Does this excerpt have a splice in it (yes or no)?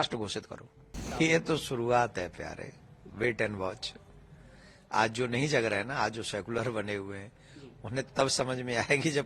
yes